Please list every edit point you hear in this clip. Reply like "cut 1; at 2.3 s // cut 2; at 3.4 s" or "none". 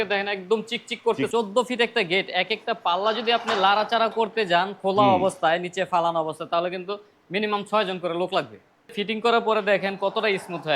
cut 1; at 1.3 s // cut 2; at 9.0 s